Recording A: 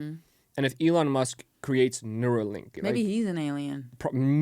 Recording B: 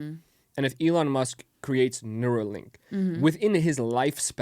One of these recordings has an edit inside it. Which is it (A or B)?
A